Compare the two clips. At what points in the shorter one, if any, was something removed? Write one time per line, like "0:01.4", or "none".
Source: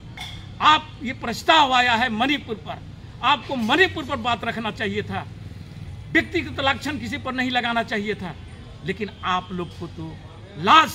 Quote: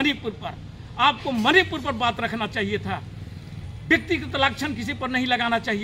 none